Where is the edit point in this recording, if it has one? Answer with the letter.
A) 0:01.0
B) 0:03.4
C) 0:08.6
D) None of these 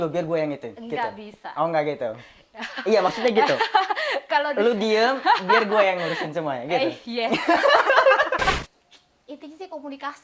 C